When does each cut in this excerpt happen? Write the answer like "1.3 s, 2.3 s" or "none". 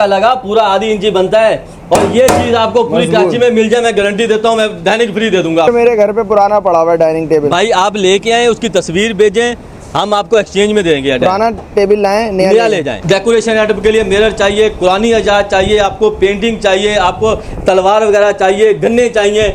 5.7 s, 12.9 s